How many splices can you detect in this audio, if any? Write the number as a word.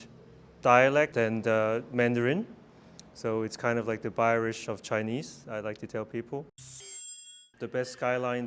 two